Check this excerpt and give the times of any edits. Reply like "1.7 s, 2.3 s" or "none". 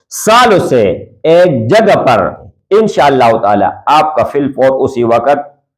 2.4 s